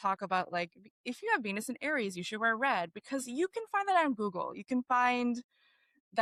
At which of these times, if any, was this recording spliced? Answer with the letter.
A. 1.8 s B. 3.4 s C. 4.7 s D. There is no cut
D